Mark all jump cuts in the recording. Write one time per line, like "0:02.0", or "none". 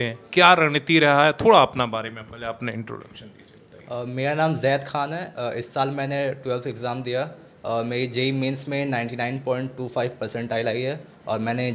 none

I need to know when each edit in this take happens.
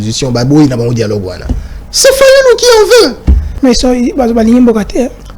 0:03.5

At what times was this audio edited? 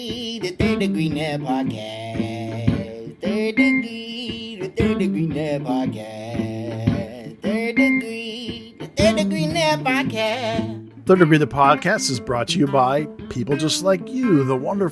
0:10.8

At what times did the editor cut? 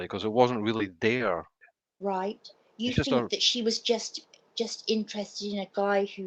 0:01.6

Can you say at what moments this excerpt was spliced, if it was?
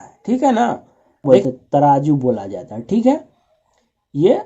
0:01.2

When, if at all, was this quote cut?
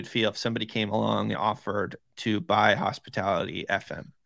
0:01.4

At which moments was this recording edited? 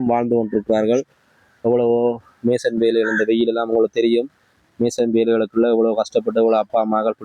none

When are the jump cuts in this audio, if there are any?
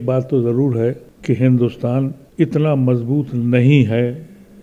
0:01.1
0:02.2

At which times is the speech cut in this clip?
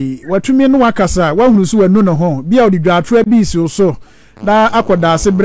none

